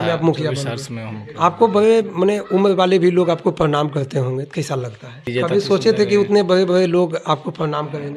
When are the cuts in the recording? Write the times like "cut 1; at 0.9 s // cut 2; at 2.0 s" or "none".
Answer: cut 1; at 5.3 s